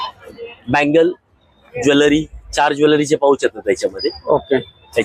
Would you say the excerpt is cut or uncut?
uncut